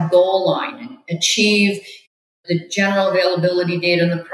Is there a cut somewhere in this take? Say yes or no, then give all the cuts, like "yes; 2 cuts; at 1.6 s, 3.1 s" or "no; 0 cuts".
yes; 1 cut; at 2.1 s